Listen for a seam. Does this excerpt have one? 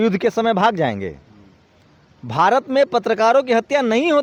no; 0 cuts

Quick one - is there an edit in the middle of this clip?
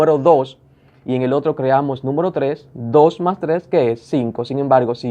no; 0 cuts

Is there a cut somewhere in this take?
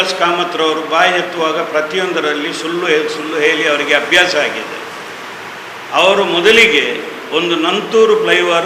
no; 0 cuts

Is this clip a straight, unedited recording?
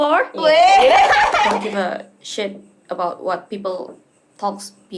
no; 1 cut; at 1.6 s

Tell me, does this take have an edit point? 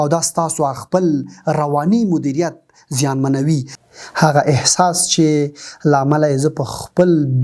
yes; 1 cut; at 3.8 s

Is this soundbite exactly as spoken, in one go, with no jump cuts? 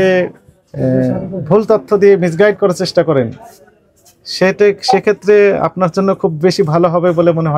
yes; 0 cuts

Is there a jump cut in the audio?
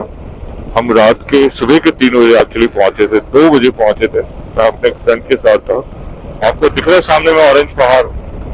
yes; 1 cut; at 6.3 s

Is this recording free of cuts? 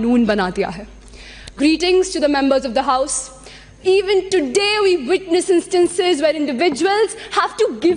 yes; 0 cuts

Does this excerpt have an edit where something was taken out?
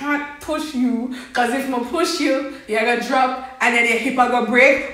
no; 0 cuts

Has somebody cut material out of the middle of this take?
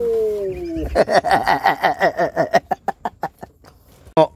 no; 0 cuts

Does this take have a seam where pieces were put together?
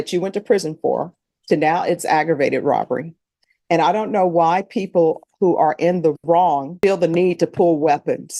yes; 1 cut; at 6.7 s

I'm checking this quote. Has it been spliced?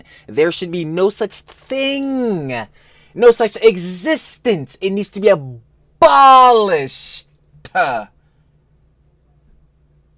no; 0 cuts

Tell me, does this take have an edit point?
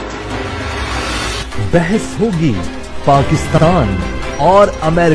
no; 0 cuts

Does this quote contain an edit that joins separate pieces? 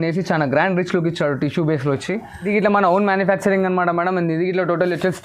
yes; 1 cut; at 2.5 s

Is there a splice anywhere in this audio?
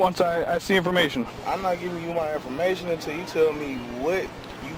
no; 0 cuts

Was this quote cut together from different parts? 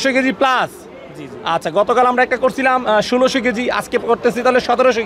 no; 0 cuts

